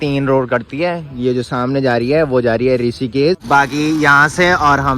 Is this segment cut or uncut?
cut